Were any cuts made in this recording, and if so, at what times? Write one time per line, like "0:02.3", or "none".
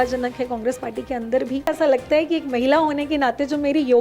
0:01.7